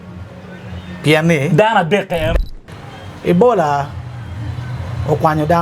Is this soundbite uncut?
no; 1 cut; at 2.3 s

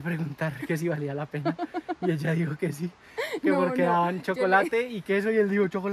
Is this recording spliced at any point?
no; 0 cuts

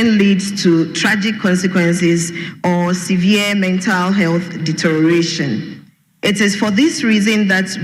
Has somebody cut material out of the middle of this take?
no; 0 cuts

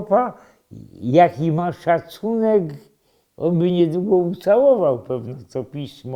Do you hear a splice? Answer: no; 0 cuts

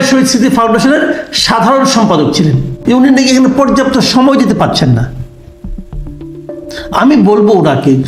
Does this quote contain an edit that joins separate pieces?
yes; 1 cut; at 2.8 s

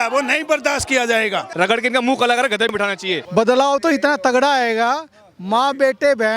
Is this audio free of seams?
no; 2 cuts; at 1.5 s, 2.8 s

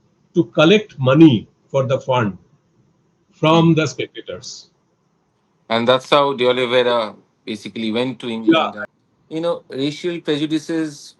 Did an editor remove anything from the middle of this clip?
yes; 1 cut; at 8.8 s

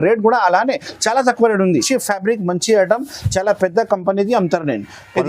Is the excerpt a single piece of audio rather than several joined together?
no; 1 cut; at 1.9 s

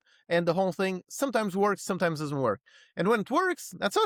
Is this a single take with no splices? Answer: yes; 0 cuts

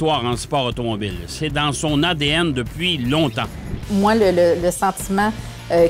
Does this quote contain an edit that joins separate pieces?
yes; 1 cut; at 3.7 s

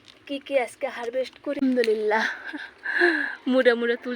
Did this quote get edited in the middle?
yes; 1 cut; at 1.6 s

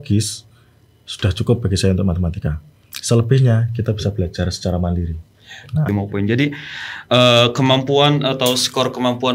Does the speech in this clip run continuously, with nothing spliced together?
no; 1 cut; at 5.9 s

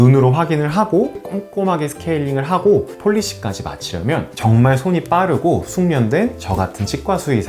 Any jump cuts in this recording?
yes; 3 cuts; at 1.2 s, 2.9 s, 4.3 s

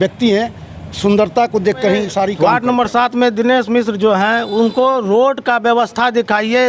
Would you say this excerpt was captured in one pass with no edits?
no; 1 cut; at 2.3 s

